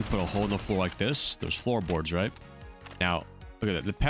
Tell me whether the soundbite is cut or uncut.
uncut